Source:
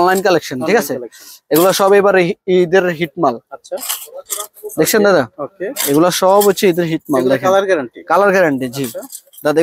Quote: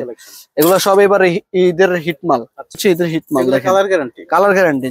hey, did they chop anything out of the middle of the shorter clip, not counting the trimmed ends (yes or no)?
yes